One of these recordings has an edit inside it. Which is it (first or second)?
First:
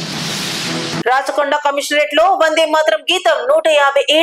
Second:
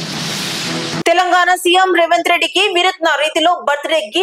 second